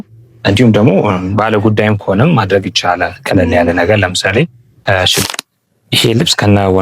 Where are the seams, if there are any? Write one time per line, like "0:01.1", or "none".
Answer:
0:05.2